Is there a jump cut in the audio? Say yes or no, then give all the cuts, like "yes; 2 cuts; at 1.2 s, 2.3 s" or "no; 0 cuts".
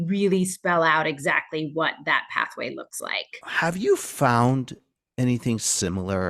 yes; 1 cut; at 3.4 s